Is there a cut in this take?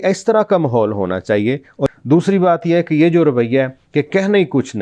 yes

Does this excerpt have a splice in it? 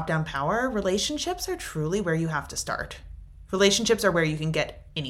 no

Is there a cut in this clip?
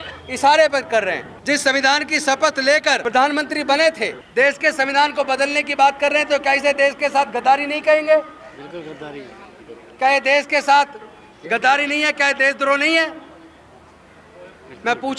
yes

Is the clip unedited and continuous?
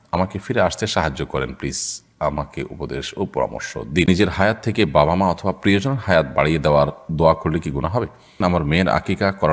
no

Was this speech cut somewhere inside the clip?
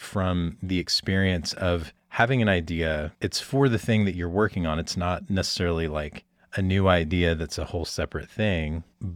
no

